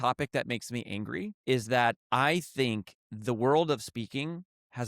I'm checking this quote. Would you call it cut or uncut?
cut